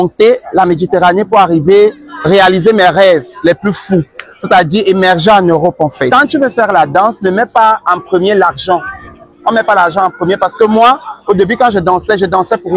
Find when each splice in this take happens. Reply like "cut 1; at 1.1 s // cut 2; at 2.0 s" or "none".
cut 1; at 6.1 s